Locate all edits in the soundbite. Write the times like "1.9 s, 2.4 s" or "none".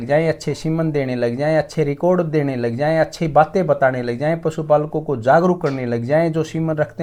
none